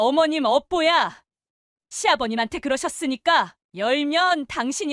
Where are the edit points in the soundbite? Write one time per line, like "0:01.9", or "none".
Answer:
0:03.6